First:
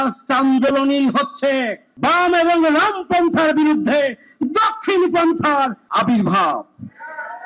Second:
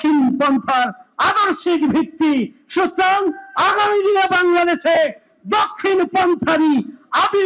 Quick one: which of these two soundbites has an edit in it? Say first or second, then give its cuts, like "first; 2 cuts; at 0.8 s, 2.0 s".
first; 2 cuts; at 1.8 s, 5.8 s